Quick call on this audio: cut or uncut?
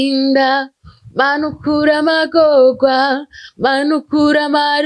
uncut